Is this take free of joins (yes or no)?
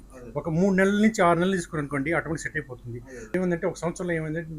no